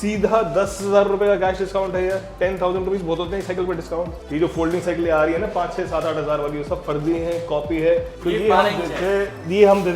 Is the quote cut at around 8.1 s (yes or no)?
yes